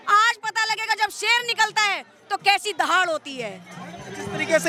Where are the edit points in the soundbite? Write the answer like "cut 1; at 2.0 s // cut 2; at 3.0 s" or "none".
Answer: none